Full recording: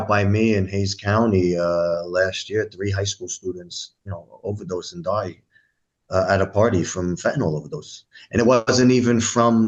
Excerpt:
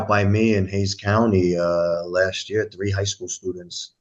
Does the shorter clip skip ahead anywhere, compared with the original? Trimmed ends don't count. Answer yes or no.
no